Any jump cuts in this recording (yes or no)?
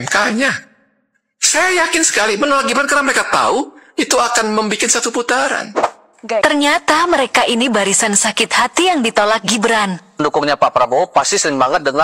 yes